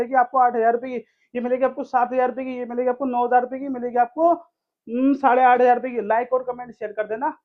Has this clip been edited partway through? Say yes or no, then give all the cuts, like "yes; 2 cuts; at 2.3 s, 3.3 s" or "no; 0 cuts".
no; 0 cuts